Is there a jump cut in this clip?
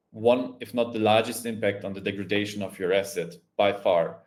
no; 0 cuts

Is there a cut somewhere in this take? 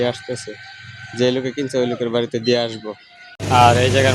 no; 0 cuts

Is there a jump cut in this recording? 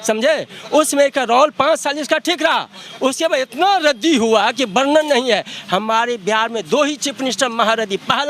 no; 0 cuts

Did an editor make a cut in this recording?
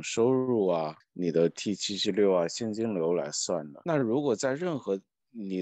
no; 0 cuts

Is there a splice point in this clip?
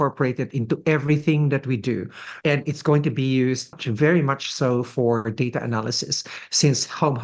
yes; 2 cuts; at 2.3 s, 3.8 s

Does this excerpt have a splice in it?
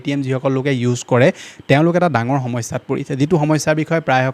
no; 0 cuts

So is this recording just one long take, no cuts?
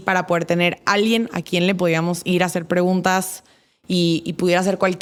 yes; 0 cuts

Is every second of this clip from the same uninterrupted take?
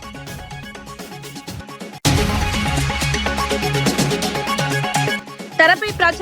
no; 4 cuts; at 1.1 s, 2.0 s, 3.3 s, 4.7 s

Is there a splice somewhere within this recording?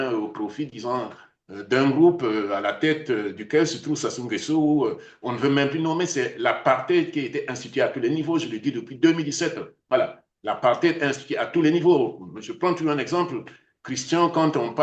no; 0 cuts

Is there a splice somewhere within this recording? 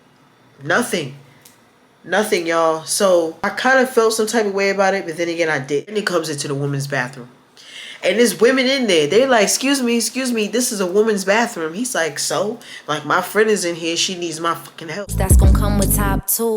yes; 2 cuts; at 5.9 s, 15.0 s

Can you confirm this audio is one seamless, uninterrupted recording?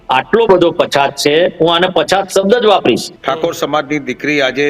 no; 1 cut; at 3.1 s

